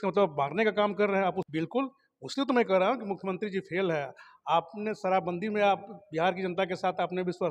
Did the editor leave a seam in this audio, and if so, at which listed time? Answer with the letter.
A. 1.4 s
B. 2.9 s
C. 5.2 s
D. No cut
A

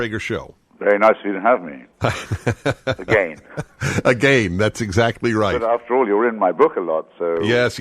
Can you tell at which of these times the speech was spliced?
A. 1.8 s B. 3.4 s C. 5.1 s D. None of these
A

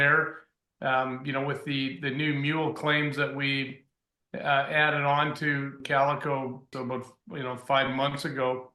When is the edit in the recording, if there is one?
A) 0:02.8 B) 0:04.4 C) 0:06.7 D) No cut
C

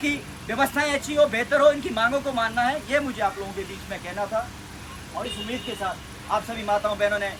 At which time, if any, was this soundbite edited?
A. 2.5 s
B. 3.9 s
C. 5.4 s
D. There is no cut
D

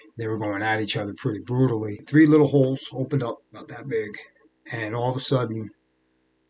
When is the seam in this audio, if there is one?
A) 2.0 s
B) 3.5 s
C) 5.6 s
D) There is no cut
A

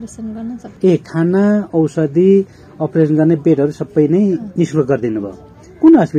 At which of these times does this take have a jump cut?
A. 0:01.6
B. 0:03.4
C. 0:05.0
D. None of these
D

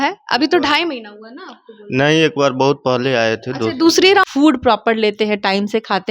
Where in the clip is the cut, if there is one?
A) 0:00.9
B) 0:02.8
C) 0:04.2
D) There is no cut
C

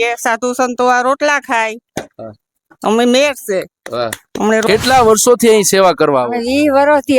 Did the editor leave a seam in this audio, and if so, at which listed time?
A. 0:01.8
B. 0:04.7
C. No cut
B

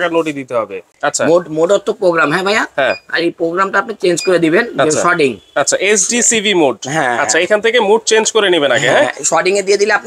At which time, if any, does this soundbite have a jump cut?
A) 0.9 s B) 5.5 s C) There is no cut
A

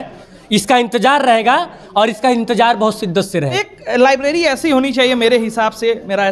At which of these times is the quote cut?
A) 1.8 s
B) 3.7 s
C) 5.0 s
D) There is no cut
B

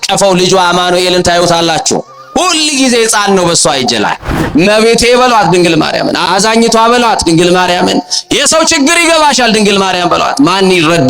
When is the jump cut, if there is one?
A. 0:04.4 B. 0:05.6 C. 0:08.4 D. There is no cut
A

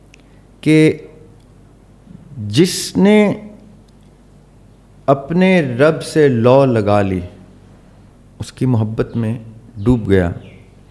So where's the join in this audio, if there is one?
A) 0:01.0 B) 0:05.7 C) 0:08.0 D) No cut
D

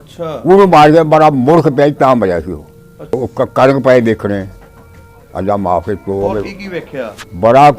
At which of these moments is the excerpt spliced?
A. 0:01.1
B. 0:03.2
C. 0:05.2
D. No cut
B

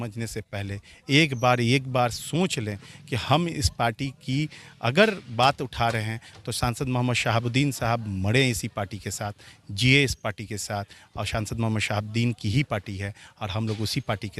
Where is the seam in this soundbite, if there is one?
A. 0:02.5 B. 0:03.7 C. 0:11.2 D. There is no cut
D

